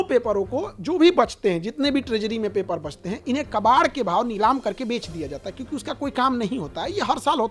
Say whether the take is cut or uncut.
uncut